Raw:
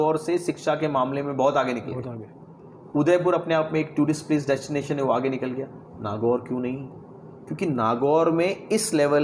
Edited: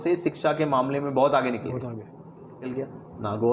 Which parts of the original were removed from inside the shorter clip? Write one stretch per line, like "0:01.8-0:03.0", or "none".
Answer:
0:02.9-0:05.4